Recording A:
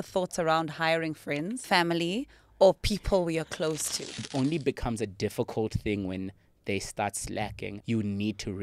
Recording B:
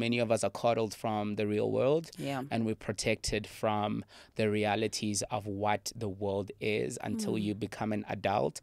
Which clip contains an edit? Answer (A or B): A